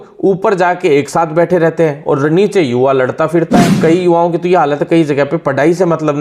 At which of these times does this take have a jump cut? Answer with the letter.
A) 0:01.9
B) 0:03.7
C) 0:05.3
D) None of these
B